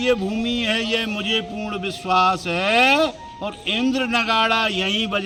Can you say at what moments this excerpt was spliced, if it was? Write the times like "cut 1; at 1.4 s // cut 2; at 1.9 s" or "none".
none